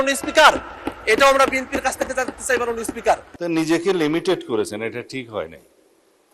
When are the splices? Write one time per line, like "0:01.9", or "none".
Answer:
0:03.3